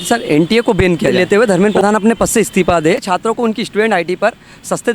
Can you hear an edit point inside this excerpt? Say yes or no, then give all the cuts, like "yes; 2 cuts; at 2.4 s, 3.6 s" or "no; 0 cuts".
yes; 2 cuts; at 1.1 s, 3.0 s